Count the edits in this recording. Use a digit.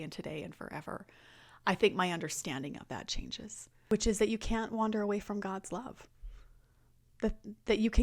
1